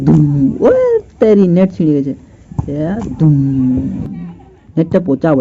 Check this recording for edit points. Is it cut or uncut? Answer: uncut